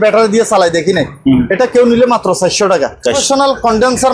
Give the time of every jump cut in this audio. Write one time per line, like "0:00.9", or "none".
0:03.2